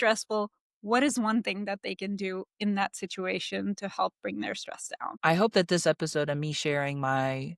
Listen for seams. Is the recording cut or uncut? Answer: cut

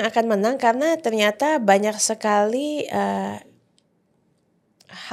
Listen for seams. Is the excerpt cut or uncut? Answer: uncut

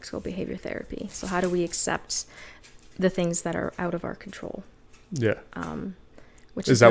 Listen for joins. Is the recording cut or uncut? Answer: uncut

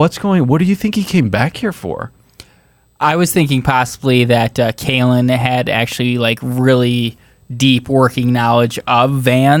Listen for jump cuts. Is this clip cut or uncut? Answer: uncut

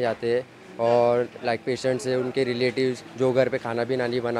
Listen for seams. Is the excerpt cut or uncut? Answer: cut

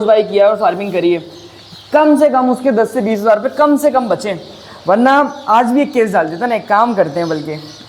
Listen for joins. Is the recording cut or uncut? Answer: uncut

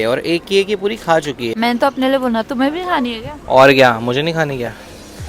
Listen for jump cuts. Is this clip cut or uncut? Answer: uncut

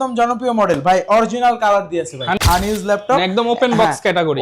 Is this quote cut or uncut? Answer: cut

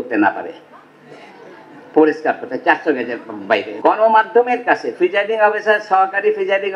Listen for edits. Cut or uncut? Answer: cut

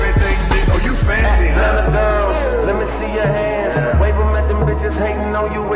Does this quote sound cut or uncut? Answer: uncut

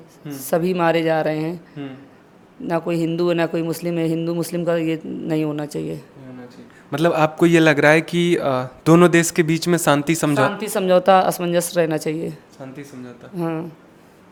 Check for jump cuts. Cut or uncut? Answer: uncut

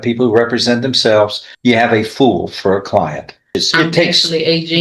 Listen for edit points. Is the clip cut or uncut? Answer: cut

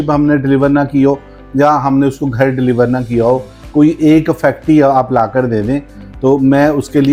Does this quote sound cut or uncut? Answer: uncut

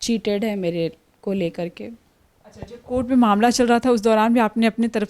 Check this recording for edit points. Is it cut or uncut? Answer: uncut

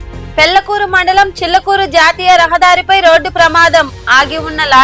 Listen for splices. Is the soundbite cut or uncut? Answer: uncut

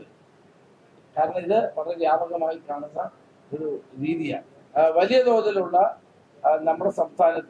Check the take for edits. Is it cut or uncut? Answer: cut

